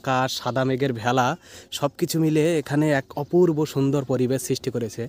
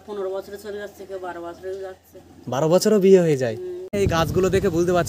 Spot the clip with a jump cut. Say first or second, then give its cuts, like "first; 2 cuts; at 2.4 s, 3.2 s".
second; 1 cut; at 3.9 s